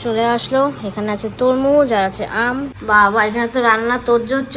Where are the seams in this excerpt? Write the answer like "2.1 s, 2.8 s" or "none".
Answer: 2.7 s